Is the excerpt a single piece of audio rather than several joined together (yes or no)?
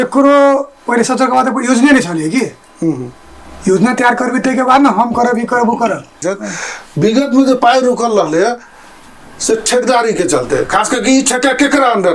no